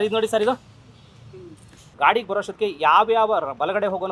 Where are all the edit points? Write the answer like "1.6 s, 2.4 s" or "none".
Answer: 1.8 s